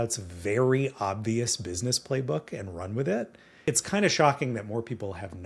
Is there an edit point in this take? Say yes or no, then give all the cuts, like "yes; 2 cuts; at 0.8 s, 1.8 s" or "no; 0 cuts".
yes; 1 cut; at 3.4 s